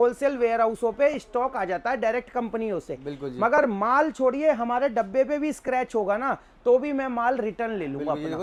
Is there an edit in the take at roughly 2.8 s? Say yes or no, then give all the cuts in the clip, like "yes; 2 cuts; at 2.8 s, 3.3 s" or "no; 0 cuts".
no; 0 cuts